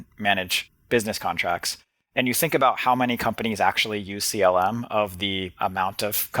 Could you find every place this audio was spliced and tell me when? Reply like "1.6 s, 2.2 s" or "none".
5.5 s